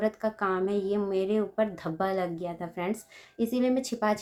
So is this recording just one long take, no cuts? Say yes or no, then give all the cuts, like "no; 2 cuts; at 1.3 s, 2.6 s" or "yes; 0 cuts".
yes; 0 cuts